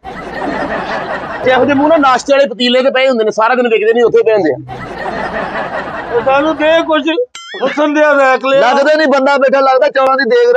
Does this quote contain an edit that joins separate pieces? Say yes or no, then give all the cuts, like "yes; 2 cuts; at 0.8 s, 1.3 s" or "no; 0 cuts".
yes; 2 cuts; at 1.4 s, 6.0 s